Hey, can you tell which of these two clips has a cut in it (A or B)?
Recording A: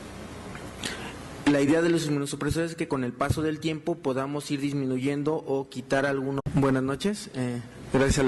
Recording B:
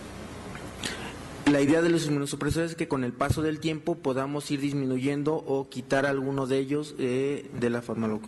B